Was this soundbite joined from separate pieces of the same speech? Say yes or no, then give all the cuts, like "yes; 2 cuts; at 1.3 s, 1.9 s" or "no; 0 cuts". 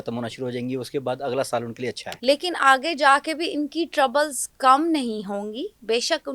yes; 1 cut; at 2.1 s